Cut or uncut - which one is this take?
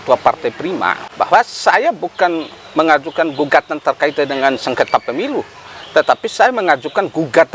cut